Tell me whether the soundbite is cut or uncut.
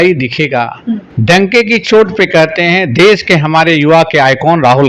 cut